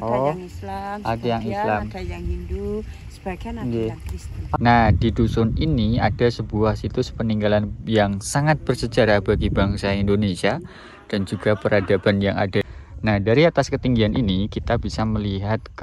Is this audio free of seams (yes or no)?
no